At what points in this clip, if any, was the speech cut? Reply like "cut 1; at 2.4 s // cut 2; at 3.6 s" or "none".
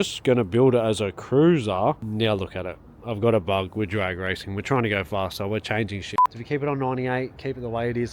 cut 1; at 2.0 s // cut 2; at 6.1 s